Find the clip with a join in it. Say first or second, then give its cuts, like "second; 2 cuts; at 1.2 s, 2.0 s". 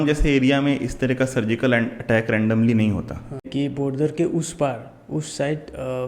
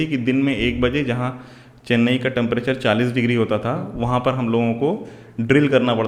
first; 1 cut; at 3.5 s